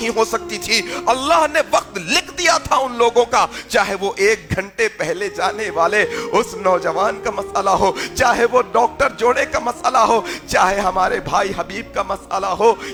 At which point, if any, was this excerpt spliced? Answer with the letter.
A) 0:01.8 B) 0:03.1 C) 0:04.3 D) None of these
D